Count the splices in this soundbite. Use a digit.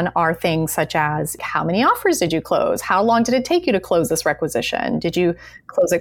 1